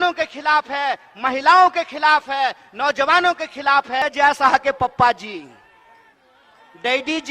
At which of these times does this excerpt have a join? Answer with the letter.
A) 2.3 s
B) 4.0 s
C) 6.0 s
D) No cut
B